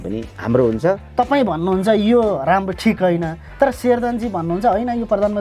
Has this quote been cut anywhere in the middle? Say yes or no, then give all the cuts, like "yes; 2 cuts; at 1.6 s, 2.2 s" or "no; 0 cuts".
yes; 1 cut; at 1.0 s